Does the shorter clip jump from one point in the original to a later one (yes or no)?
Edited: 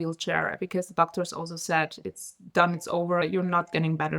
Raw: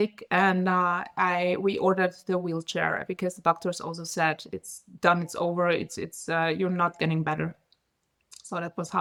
yes